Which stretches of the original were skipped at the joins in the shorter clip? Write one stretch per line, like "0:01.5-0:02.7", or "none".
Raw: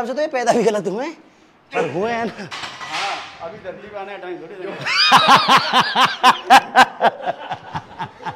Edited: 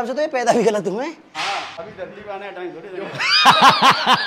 0:01.6-0:03.3

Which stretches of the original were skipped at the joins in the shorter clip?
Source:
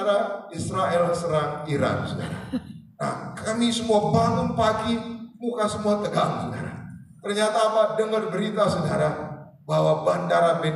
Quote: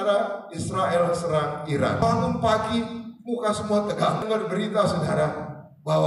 0:02.0-0:04.2
0:06.4-0:08.1

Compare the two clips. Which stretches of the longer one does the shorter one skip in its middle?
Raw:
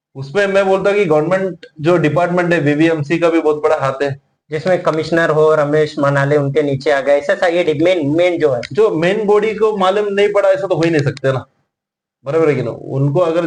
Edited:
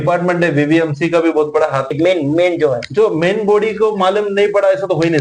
0:04.0-0:07.7

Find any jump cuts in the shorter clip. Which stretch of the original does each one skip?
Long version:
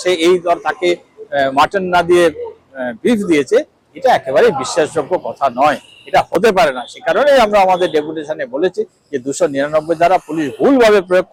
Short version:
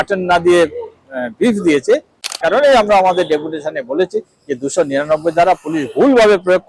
0:03.9-0:06.9

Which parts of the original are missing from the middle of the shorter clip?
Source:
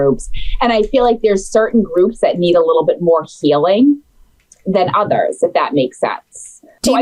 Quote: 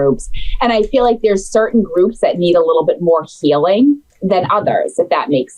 0:04.1-0:04.5

